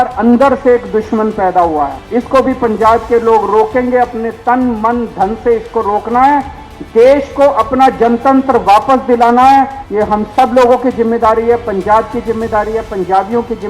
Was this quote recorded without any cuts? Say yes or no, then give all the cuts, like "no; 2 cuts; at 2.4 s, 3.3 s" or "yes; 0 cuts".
no; 2 cuts; at 2.0 s, 9.8 s